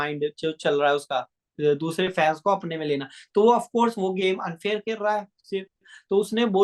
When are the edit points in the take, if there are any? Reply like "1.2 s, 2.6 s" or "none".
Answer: none

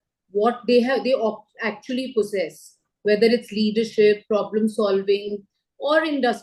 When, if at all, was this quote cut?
none

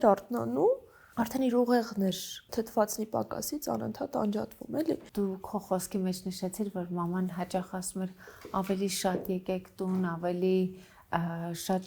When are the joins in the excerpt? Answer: 1.0 s, 2.3 s, 5.1 s

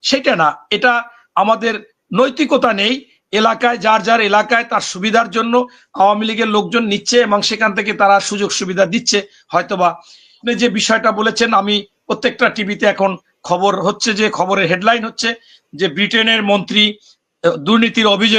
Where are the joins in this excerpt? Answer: 10.4 s

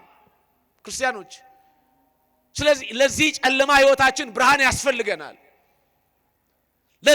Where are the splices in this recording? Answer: none

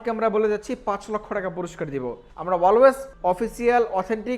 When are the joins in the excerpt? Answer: 2.3 s, 3.1 s

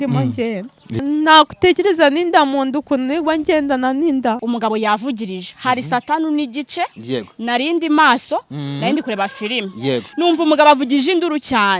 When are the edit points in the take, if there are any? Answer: 1.0 s, 4.4 s

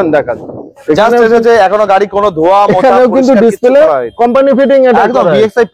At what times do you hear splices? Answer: none

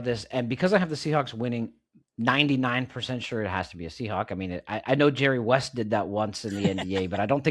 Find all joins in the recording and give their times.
none

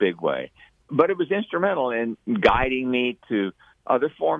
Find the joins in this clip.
0.9 s, 2.2 s

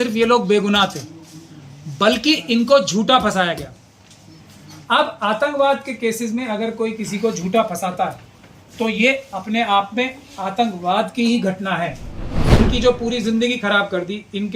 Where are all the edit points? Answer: 12.6 s

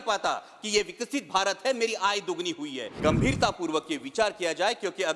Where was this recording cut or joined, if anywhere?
2.9 s

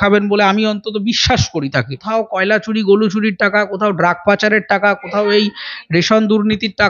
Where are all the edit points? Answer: 2.0 s

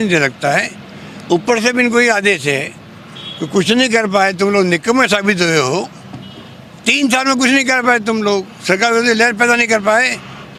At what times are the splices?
none

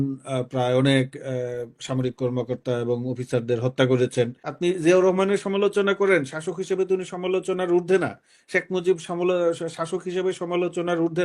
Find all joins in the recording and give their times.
4.4 s

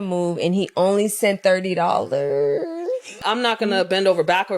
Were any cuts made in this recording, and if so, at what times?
3.1 s

